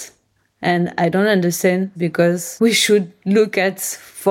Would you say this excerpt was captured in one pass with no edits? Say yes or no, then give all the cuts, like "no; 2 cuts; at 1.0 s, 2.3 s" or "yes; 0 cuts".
no; 1 cut; at 2.2 s